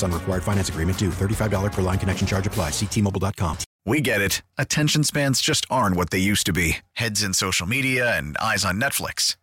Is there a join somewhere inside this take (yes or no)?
yes